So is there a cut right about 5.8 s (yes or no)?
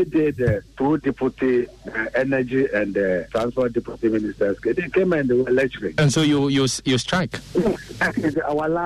yes